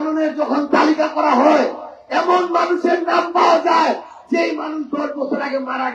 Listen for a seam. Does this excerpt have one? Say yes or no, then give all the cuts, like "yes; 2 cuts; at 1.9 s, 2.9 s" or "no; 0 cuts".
no; 0 cuts